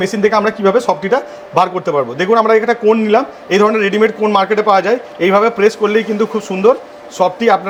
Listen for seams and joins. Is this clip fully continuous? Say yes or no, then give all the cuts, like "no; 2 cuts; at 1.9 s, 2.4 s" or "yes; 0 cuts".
yes; 0 cuts